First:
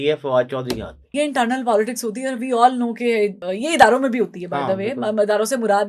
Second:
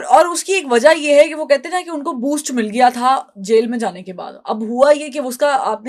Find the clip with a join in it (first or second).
first